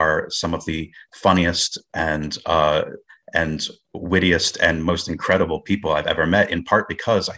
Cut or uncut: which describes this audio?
uncut